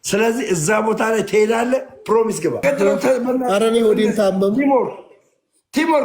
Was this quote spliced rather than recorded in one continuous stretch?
yes; 1 cut; at 2.6 s

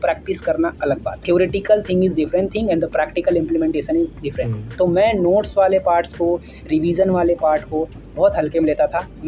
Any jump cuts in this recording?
no; 0 cuts

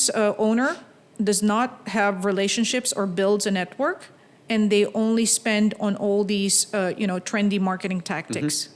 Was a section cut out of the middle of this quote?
no; 0 cuts

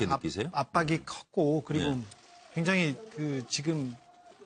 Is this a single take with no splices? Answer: yes; 0 cuts

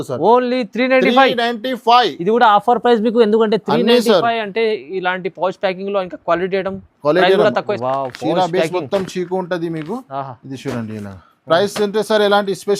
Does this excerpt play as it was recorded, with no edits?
no; 1 cut; at 7.6 s

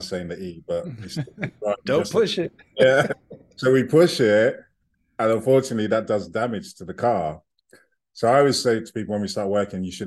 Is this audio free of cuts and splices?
yes; 0 cuts

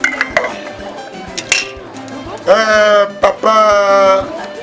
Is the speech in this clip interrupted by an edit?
no; 0 cuts

